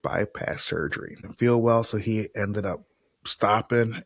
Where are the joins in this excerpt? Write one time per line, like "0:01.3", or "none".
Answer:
0:01.3